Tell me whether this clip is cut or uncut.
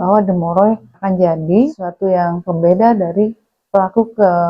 cut